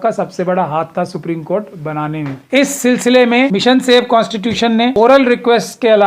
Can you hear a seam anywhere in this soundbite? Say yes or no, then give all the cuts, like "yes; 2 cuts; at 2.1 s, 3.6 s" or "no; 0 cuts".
yes; 3 cuts; at 2.4 s, 3.5 s, 4.9 s